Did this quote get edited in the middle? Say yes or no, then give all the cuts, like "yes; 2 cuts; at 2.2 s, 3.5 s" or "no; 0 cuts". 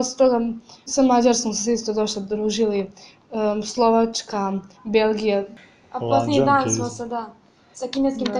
yes; 2 cuts; at 0.8 s, 5.6 s